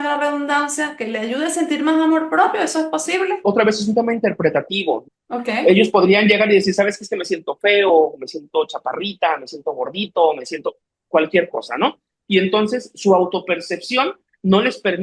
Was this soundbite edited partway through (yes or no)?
yes